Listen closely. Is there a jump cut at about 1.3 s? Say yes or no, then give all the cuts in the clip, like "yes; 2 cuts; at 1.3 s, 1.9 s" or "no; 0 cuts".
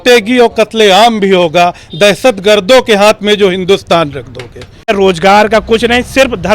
no; 1 cut; at 4.9 s